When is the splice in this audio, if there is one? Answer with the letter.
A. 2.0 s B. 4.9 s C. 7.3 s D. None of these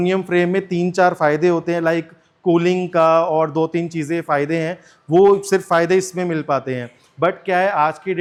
D